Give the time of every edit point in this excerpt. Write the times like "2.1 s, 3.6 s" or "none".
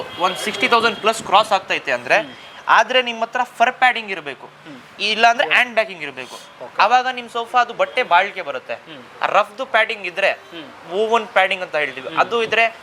none